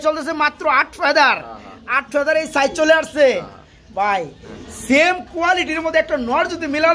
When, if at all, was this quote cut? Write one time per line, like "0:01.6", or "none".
none